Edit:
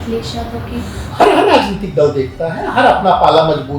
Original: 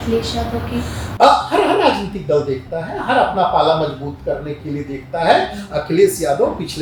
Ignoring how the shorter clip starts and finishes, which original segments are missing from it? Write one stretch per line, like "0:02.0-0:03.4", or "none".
0:01.1-0:01.5